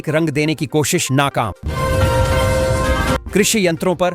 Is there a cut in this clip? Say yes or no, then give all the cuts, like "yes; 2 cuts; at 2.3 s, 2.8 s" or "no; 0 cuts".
yes; 2 cuts; at 1.6 s, 3.2 s